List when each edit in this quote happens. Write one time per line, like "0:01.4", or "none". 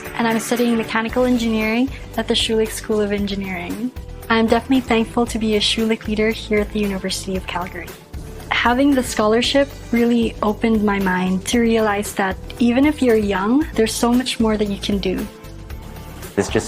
0:01.1